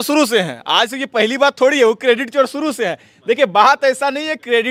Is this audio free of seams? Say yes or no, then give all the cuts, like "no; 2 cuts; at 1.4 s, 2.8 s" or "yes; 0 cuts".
yes; 0 cuts